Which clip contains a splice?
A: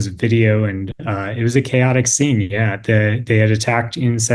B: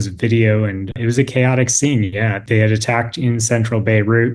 B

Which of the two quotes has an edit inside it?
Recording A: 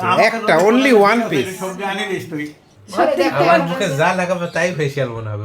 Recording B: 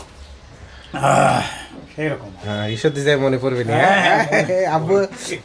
A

